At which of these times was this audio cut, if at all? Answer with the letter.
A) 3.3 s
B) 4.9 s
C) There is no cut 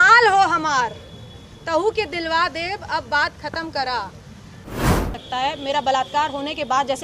B